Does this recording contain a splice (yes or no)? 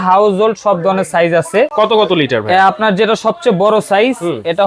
no